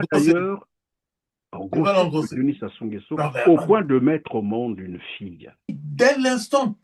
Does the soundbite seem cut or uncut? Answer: cut